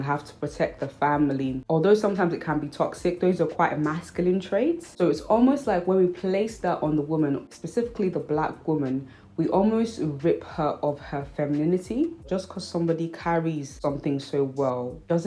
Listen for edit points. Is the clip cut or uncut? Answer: cut